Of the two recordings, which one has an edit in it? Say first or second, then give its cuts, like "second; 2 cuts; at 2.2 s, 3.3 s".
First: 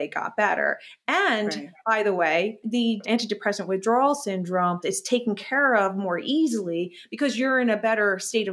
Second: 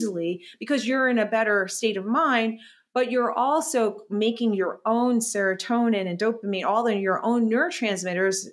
first; 2 cuts; at 2.8 s, 4.8 s